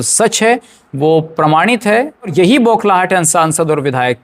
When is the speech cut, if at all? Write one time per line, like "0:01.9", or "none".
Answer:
0:02.3